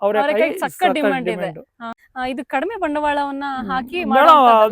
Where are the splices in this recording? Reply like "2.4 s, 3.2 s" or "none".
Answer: 2.0 s